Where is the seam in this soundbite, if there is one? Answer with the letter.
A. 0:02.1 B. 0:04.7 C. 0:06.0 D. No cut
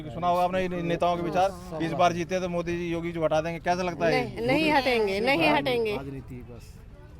D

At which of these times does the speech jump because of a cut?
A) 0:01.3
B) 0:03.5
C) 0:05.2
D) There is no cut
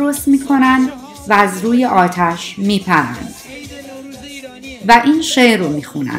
D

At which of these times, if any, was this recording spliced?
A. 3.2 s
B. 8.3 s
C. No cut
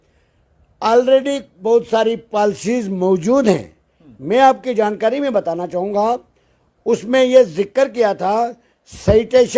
C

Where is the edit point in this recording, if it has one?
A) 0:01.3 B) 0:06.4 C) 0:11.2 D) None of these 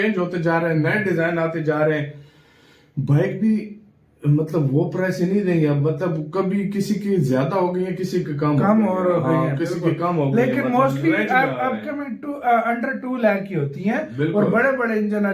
D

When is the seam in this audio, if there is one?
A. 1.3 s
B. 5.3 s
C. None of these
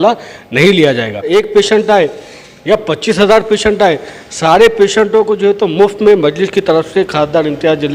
A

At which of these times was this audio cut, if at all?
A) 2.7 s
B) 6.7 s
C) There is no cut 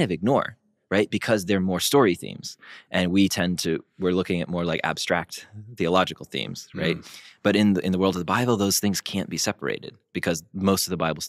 C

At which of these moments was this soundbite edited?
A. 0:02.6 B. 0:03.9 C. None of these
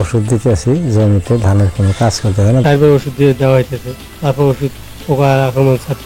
A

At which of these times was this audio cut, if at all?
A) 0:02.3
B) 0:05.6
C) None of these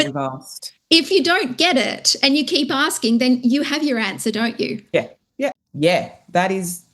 B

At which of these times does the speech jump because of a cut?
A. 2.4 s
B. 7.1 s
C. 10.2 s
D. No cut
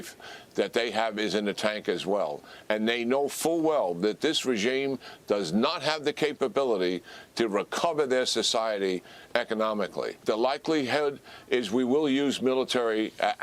C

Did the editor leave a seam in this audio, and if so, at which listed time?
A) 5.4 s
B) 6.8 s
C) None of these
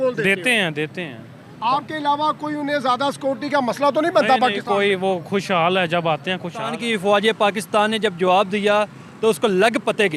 B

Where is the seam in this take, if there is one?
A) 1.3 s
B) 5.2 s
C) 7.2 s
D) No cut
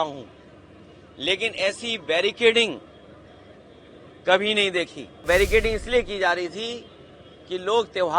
B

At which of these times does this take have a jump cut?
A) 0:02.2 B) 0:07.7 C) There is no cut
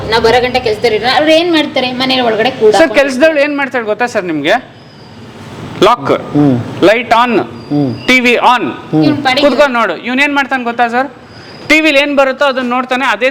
C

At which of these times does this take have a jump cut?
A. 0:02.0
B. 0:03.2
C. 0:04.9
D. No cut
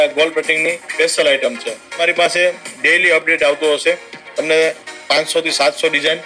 A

